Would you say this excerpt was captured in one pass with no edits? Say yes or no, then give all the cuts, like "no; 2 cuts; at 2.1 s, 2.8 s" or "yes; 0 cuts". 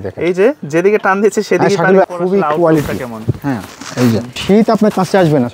no; 2 cuts; at 2.0 s, 4.3 s